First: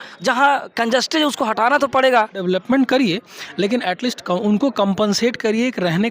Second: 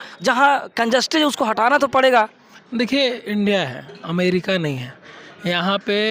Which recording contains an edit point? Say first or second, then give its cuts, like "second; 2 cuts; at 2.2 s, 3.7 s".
first; 1 cut; at 2.4 s